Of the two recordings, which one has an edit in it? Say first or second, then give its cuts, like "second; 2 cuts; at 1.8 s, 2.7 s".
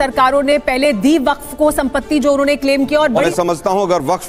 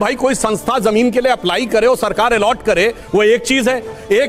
first; 1 cut; at 3.3 s